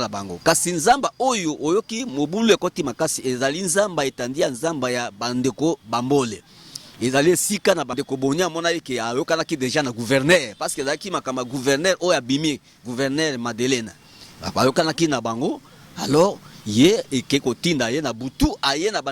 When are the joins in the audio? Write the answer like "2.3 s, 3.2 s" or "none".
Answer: 7.9 s